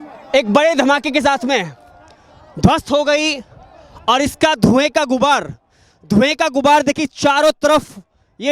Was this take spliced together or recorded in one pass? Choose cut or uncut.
uncut